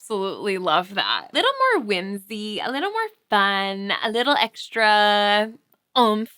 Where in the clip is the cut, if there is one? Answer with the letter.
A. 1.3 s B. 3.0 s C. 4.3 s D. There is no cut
A